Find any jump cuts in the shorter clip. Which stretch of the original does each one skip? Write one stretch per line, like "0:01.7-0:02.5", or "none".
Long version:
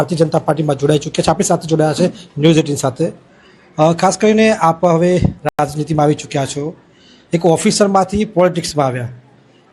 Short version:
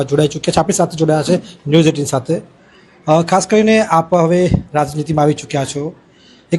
0:05.4-0:05.5